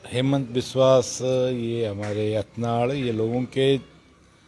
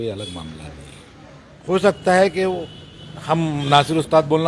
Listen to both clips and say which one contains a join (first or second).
second